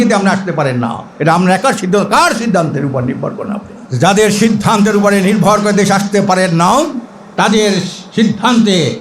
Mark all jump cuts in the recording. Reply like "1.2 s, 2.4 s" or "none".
1.0 s, 3.8 s